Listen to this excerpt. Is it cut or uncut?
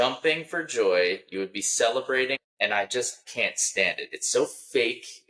cut